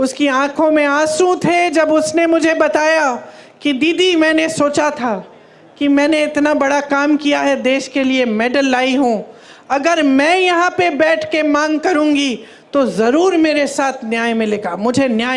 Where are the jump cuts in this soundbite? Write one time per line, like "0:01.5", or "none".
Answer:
none